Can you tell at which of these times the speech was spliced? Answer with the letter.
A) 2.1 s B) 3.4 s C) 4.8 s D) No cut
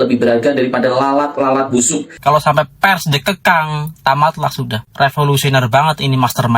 A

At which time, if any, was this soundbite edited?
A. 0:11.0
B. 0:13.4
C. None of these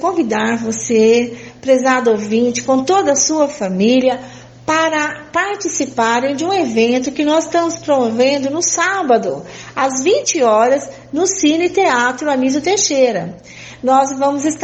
C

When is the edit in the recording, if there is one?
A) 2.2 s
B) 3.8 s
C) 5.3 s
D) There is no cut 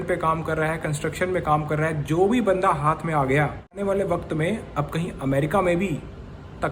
B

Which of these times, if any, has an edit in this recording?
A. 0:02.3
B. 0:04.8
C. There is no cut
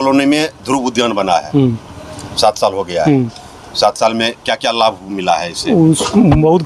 C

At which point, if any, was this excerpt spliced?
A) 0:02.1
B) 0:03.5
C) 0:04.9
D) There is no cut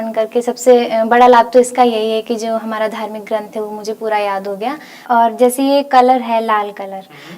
C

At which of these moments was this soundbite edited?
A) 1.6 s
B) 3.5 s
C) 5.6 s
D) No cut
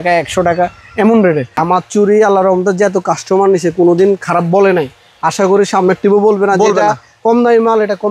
A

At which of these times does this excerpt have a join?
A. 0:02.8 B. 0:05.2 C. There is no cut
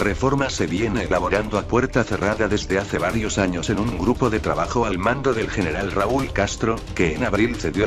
A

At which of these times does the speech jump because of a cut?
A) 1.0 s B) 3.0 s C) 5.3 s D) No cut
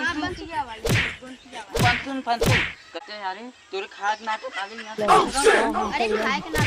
B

